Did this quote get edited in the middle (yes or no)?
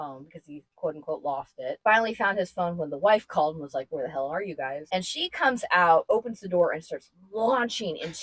yes